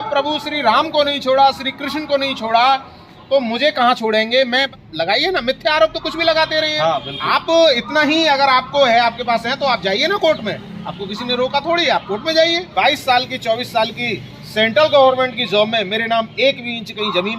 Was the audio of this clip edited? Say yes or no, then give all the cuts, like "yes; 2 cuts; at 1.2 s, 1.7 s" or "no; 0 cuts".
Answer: yes; 2 cuts; at 4.7 s, 12.7 s